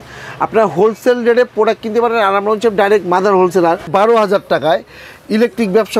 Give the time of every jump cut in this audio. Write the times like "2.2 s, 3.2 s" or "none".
3.9 s